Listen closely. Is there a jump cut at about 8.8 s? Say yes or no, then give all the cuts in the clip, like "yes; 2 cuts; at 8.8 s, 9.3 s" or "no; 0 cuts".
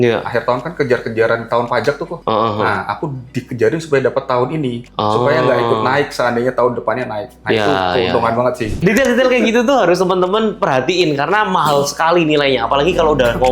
yes; 1 cut; at 8.8 s